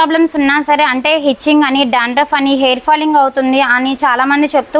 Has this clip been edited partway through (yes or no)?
no